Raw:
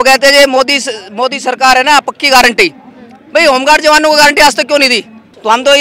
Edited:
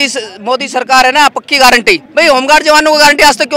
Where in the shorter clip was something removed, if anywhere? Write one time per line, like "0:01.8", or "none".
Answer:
0:02.0